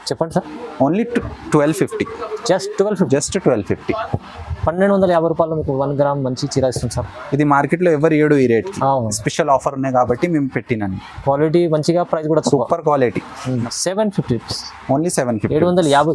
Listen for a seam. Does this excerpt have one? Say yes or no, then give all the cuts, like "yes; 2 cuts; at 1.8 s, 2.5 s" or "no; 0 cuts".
yes; 1 cut; at 13.6 s